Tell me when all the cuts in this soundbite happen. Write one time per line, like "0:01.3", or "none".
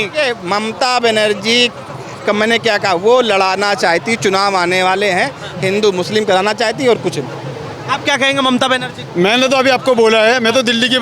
none